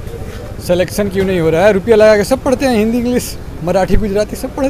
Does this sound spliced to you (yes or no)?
no